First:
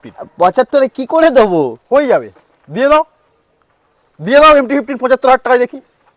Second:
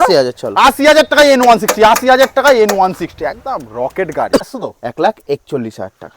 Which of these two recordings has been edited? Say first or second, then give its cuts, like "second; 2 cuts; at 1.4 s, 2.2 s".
second; 1 cut; at 4.5 s